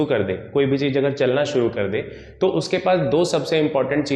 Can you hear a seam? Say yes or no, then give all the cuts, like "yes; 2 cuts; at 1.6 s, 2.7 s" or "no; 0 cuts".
no; 0 cuts